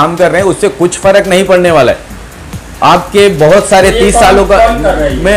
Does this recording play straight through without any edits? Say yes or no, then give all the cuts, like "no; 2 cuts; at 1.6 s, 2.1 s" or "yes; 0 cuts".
yes; 0 cuts